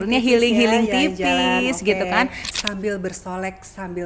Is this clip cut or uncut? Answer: cut